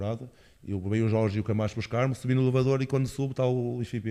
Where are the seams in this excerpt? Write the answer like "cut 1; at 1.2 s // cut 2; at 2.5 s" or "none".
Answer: none